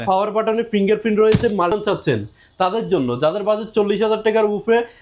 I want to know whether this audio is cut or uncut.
cut